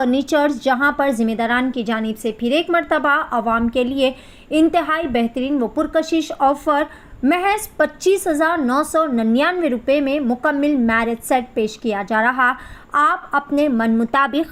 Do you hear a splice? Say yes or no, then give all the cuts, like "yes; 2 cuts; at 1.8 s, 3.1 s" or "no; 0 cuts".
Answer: no; 0 cuts